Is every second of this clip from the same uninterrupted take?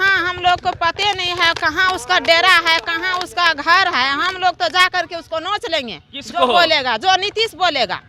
yes; 0 cuts

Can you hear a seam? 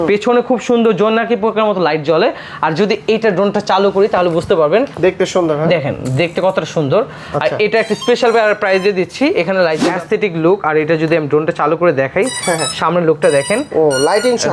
yes; 1 cut; at 9.8 s

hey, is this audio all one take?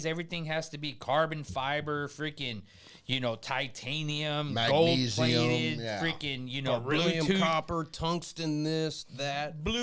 yes; 0 cuts

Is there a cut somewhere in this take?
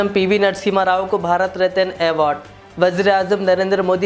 no; 0 cuts

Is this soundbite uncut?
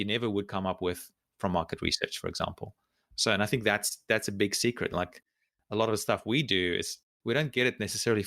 no; 1 cut; at 7.0 s

